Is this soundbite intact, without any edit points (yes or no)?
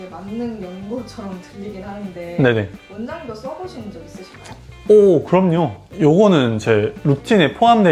yes